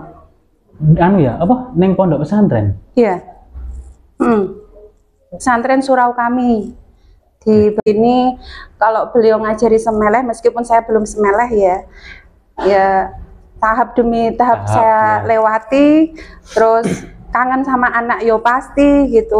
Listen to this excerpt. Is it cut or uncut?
cut